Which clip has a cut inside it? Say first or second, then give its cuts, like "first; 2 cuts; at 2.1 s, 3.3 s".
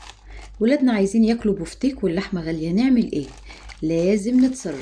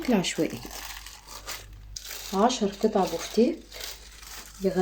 second; 1 cut; at 1.9 s